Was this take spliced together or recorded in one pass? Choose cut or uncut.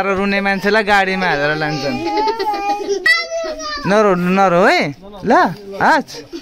cut